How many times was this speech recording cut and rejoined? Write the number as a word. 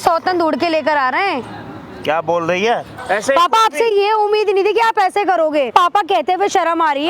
two